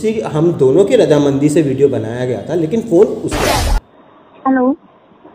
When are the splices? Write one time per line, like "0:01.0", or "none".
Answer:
0:03.7